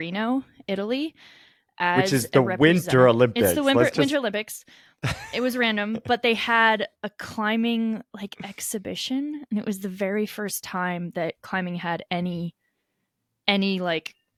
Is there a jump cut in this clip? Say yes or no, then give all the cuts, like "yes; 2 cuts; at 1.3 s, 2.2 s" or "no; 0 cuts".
no; 0 cuts